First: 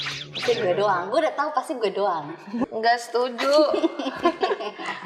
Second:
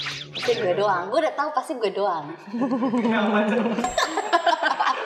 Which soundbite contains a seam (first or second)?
first